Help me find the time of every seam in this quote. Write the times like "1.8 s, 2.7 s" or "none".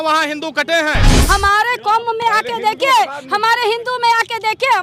1.2 s